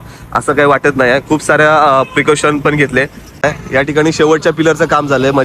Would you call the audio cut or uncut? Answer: cut